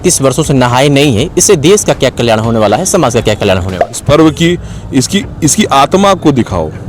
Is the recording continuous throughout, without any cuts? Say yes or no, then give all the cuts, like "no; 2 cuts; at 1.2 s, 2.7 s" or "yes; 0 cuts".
no; 1 cut; at 3.8 s